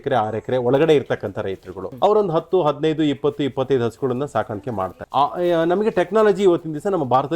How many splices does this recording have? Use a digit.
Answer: 2